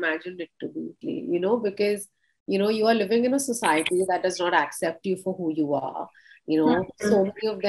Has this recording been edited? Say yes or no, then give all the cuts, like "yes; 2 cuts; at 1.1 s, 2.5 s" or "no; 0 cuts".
no; 0 cuts